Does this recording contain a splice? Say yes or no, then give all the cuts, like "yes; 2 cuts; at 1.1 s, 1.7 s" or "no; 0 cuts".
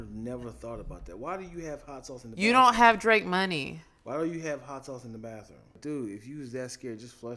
yes; 1 cut; at 5.8 s